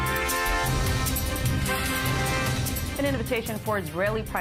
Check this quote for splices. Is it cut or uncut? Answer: uncut